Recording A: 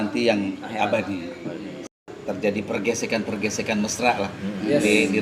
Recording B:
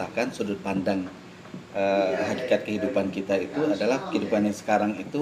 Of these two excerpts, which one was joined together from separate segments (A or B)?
A